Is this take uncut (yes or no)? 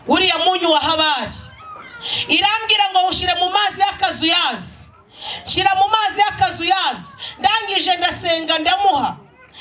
yes